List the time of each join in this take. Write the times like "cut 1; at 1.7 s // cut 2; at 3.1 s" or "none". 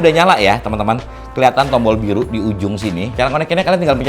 cut 1; at 3.1 s